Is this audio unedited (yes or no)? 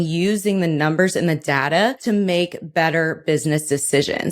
no